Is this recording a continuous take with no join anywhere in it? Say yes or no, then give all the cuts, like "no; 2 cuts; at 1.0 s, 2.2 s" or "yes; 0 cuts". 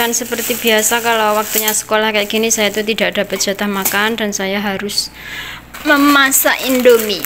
yes; 0 cuts